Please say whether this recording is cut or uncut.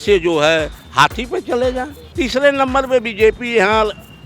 cut